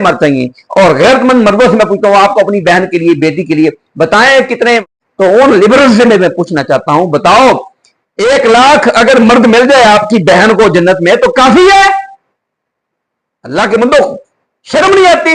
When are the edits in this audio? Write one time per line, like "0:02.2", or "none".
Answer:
0:05.0